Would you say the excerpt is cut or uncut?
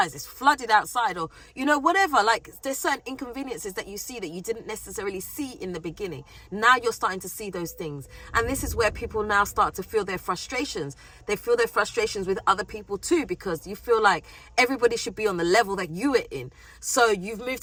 uncut